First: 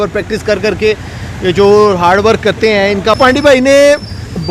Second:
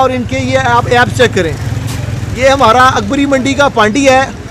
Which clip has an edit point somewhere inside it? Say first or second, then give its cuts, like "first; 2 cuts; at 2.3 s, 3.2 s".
first; 1 cut; at 3.2 s